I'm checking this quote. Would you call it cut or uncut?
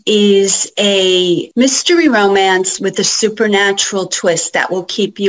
cut